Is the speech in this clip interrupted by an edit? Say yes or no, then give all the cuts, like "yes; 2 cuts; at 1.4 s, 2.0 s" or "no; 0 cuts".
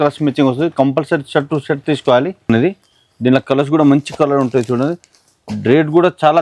yes; 1 cut; at 2.5 s